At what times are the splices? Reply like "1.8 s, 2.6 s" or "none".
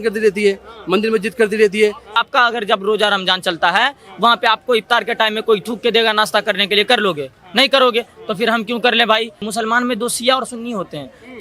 2.2 s, 9.5 s